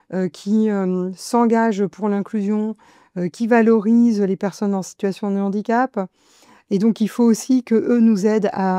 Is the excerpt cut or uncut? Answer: uncut